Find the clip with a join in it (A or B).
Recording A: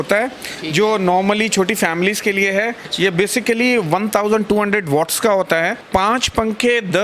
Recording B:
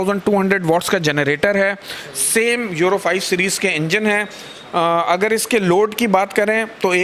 A